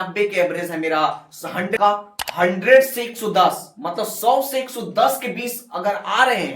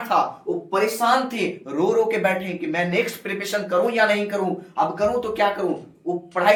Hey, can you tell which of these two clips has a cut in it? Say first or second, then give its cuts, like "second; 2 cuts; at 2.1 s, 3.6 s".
first; 1 cut; at 1.8 s